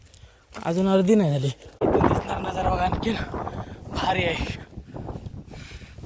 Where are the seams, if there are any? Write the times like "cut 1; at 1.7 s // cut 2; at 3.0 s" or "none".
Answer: cut 1; at 1.8 s